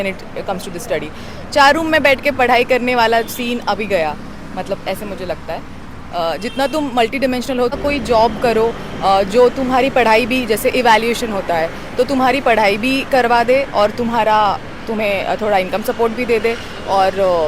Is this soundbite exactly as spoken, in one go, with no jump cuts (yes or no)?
no